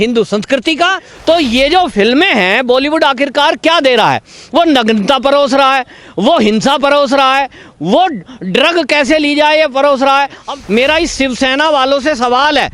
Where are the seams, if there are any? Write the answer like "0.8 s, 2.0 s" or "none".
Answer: 1.1 s, 10.5 s